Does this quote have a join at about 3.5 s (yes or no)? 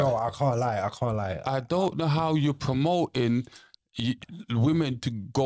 no